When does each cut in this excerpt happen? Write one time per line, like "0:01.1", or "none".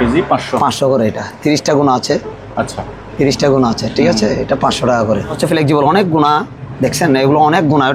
0:05.4